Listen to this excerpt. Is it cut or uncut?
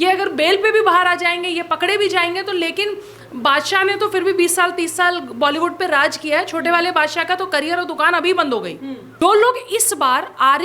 cut